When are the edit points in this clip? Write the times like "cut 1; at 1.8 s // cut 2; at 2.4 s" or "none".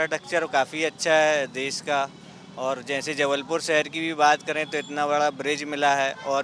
none